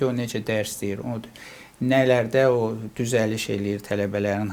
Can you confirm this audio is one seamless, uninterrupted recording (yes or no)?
yes